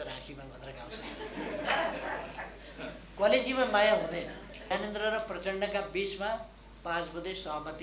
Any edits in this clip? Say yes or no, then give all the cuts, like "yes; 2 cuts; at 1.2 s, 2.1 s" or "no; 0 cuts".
yes; 1 cut; at 4.7 s